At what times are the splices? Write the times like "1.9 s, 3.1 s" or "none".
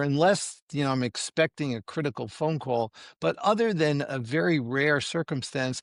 none